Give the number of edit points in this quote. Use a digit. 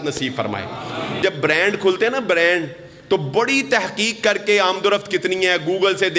1